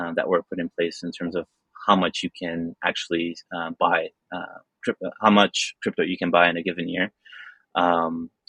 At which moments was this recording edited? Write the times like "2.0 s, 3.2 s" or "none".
none